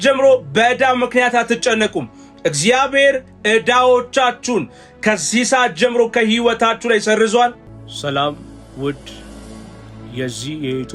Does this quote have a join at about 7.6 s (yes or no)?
yes